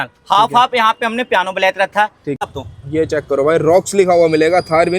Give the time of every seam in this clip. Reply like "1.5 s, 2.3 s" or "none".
2.4 s